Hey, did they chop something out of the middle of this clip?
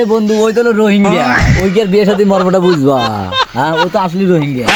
no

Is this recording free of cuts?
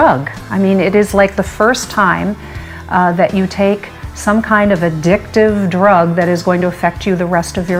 yes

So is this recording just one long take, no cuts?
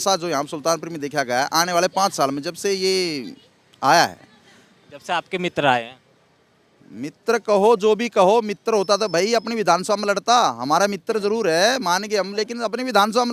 yes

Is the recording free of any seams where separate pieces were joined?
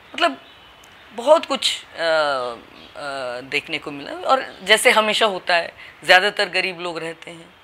yes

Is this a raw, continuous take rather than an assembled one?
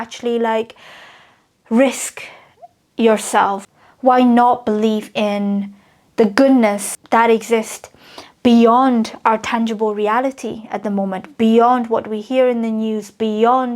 no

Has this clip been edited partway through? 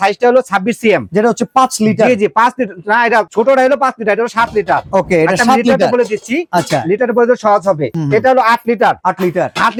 no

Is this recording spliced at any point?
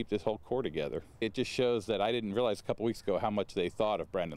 yes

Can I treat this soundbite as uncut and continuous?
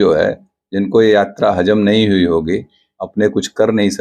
yes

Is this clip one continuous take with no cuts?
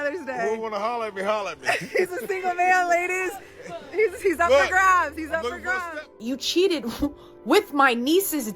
no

